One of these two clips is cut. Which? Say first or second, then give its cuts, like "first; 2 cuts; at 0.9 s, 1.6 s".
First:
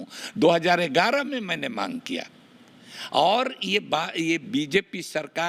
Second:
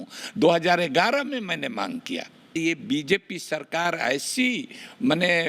second; 1 cut; at 2.5 s